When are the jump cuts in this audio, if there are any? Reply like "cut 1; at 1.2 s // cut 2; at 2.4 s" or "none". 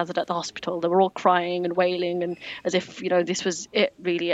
cut 1; at 3.4 s